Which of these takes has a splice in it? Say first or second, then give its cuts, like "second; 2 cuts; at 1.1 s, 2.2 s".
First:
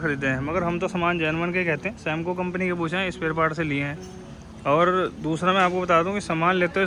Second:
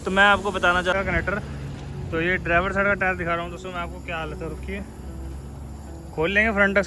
second; 1 cut; at 0.9 s